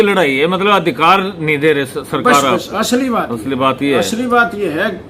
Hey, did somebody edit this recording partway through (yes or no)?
no